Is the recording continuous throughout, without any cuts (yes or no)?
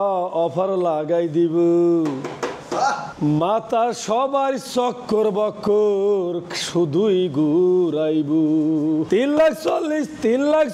yes